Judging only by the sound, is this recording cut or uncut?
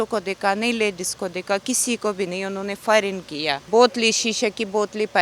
cut